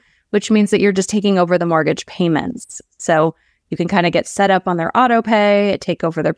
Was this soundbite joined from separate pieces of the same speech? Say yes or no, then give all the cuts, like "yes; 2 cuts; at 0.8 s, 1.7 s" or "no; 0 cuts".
no; 0 cuts